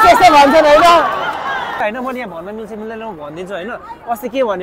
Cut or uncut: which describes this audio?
cut